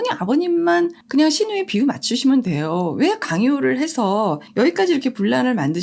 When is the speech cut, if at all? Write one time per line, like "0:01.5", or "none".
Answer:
0:01.0